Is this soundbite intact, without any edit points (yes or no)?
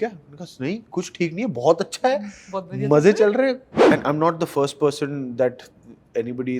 no